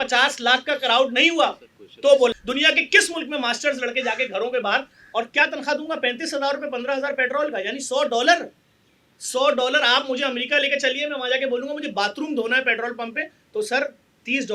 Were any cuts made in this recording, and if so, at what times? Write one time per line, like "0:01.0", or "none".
0:02.4